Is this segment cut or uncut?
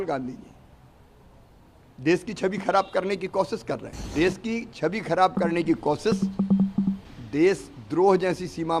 cut